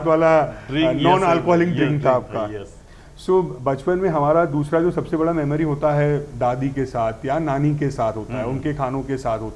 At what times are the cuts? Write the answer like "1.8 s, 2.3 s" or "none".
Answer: none